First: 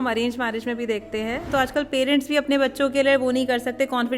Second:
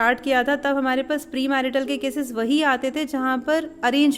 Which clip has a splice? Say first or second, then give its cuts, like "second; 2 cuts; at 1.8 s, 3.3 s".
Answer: first; 1 cut; at 1.5 s